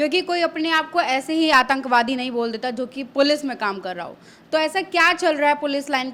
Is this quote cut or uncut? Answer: uncut